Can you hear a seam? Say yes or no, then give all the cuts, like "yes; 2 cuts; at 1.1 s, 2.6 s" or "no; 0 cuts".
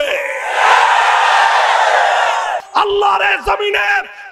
yes; 1 cut; at 2.6 s